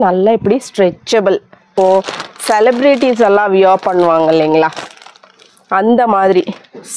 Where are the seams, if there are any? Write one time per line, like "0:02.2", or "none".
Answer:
0:01.7